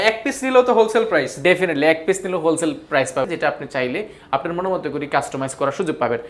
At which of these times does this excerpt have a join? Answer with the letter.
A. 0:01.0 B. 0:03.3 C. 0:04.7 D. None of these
B